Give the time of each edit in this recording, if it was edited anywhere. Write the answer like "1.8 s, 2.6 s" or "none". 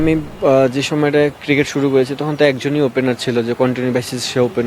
none